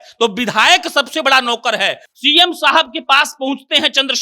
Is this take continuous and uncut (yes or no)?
no